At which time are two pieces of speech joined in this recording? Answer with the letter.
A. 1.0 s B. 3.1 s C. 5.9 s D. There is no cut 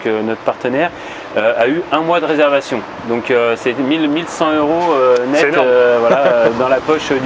D